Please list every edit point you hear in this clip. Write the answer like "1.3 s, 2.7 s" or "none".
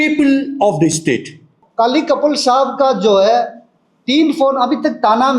1.6 s